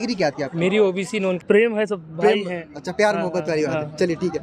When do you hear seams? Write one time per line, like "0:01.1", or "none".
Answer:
0:01.4